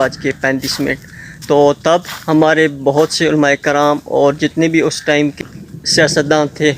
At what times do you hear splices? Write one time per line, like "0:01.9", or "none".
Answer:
0:05.4